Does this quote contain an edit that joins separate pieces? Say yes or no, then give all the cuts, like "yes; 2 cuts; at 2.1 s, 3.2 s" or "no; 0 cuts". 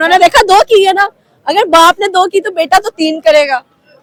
no; 0 cuts